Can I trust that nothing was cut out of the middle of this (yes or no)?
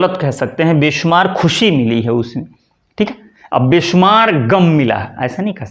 yes